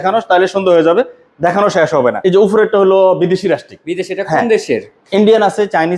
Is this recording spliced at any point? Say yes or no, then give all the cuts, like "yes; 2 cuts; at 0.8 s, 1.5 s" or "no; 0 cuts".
yes; 1 cut; at 2.2 s